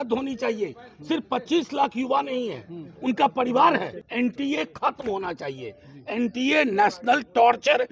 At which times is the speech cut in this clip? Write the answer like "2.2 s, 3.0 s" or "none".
4.0 s

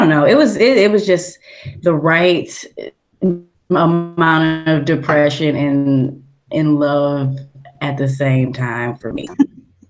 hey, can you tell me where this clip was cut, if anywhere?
none

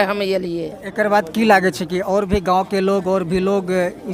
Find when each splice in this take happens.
none

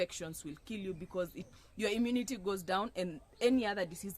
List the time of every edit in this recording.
1.5 s

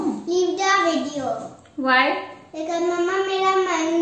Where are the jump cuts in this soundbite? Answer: none

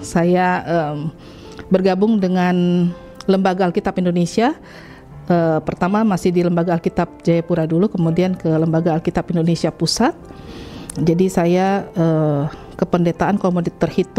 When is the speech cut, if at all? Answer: none

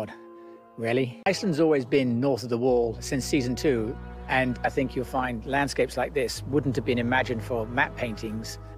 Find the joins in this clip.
5.4 s

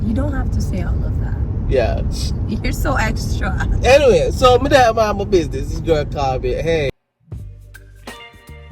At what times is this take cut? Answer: 7.1 s

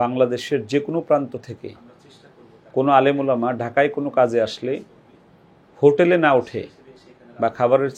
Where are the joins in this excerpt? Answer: none

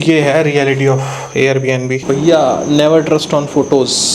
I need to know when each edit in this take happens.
2.0 s

